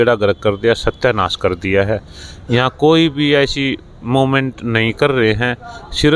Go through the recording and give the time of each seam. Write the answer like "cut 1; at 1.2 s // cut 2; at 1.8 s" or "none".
none